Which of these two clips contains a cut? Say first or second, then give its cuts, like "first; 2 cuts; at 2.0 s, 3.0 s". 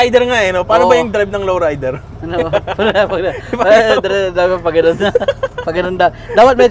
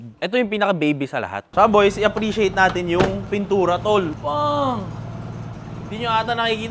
second; 2 cuts; at 1.4 s, 4.2 s